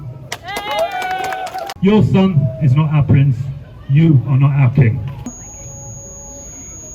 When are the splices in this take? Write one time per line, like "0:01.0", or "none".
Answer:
0:01.6
0:05.2